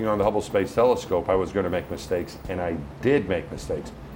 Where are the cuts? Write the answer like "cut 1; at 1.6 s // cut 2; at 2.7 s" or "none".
none